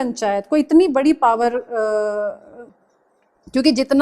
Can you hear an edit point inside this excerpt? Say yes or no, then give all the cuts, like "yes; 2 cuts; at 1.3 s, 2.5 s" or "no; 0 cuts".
yes; 1 cut; at 2.6 s